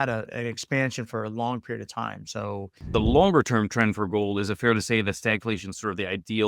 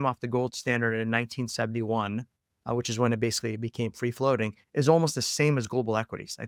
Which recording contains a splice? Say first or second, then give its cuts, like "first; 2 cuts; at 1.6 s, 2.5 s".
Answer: first; 1 cut; at 2.9 s